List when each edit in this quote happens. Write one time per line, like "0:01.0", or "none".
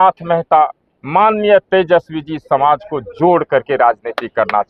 none

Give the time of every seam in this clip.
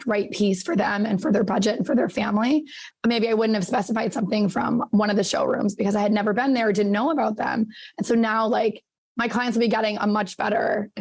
0:02.8

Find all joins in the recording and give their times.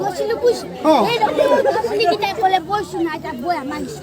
0:01.3

